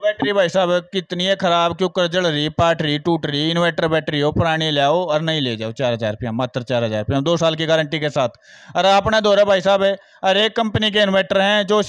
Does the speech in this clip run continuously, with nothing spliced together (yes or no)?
yes